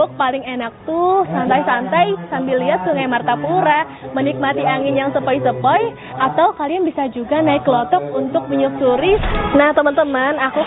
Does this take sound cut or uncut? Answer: cut